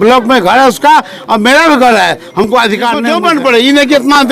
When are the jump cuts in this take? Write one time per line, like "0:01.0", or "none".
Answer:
0:03.0